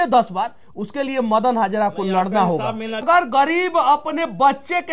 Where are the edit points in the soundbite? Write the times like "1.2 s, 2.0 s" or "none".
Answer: 3.0 s